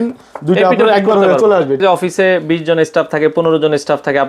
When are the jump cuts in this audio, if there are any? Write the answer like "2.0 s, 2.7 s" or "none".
1.8 s